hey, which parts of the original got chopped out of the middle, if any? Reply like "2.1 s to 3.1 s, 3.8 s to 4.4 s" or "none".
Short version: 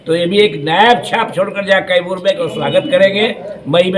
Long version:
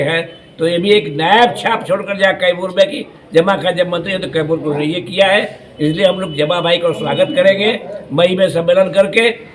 3.0 s to 6.9 s

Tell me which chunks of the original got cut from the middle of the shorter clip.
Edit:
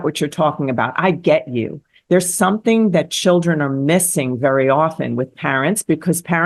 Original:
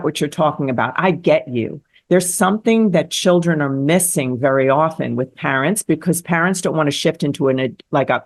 none

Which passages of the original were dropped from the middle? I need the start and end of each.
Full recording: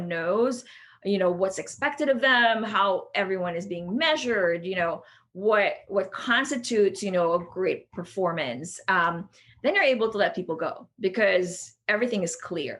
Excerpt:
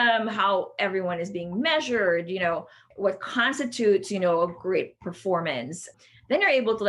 5.3 s to 5.8 s, 8.8 s to 9.2 s

